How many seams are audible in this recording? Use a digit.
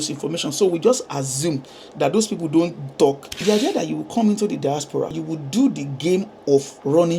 2